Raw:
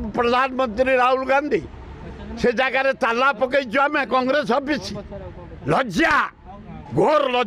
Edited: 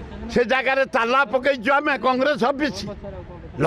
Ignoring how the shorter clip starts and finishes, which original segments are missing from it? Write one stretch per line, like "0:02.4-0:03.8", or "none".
none